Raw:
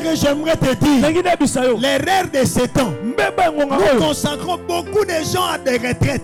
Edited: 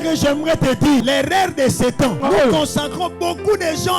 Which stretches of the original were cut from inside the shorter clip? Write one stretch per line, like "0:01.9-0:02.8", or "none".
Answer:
0:01.0-0:01.8
0:03.0-0:03.7